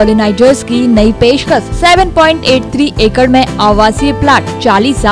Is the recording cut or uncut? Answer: uncut